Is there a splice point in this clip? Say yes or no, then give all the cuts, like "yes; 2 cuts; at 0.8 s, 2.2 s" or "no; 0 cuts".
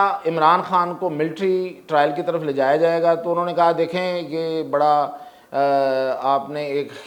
no; 0 cuts